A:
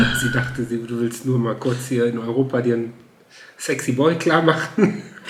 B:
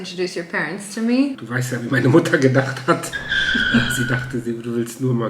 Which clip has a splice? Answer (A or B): B